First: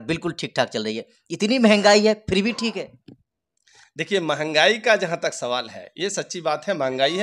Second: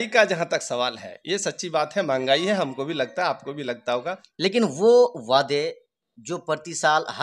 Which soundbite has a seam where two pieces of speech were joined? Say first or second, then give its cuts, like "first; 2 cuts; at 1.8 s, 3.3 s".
second; 1 cut; at 4.2 s